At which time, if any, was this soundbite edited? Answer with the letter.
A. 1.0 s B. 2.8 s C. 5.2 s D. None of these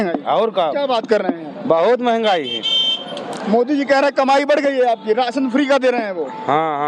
D